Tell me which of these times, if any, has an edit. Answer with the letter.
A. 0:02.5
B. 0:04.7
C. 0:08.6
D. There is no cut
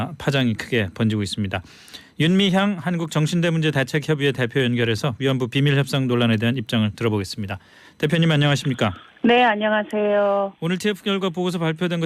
B